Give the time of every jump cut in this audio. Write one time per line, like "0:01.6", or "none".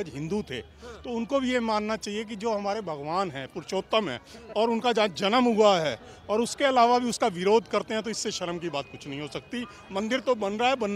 none